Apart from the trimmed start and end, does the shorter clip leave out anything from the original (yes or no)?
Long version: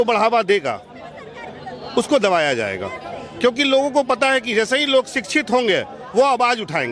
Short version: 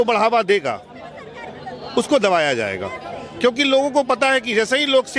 no